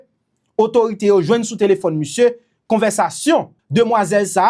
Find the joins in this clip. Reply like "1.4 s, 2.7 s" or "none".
3.6 s